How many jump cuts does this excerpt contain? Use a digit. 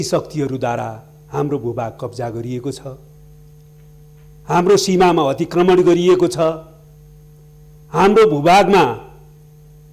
0